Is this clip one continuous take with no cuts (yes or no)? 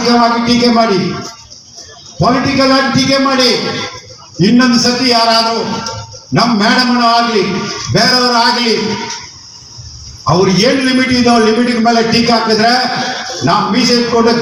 yes